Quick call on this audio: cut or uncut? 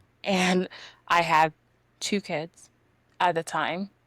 uncut